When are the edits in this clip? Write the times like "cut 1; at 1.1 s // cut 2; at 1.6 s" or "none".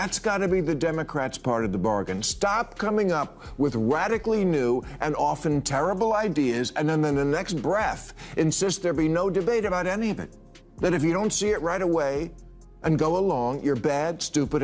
cut 1; at 10.6 s